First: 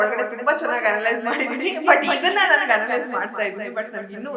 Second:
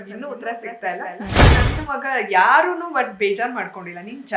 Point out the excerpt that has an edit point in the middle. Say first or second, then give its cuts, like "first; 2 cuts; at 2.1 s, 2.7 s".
second; 1 cut; at 1.4 s